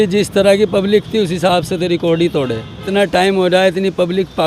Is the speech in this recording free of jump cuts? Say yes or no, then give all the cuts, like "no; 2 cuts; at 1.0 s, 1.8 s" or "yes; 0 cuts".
no; 1 cut; at 2.9 s